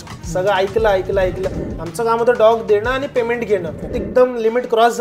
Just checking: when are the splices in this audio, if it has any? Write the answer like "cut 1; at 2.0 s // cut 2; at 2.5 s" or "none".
cut 1; at 1.5 s // cut 2; at 3.9 s